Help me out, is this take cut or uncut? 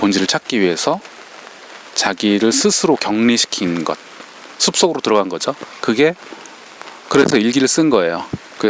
uncut